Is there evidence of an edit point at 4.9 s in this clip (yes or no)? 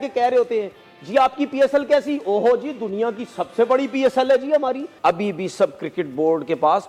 yes